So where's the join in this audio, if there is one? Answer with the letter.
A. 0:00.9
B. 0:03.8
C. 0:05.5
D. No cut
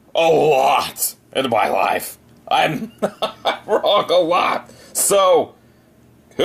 D